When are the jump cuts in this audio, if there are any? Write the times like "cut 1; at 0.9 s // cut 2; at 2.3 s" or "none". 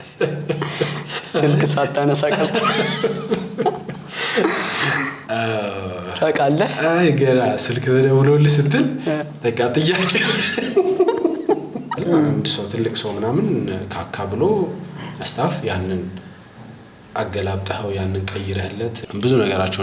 cut 1; at 12.0 s // cut 2; at 19.0 s